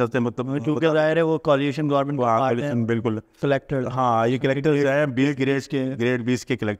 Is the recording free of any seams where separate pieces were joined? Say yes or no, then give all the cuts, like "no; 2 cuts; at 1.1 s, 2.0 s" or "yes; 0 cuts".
no; 1 cut; at 3.4 s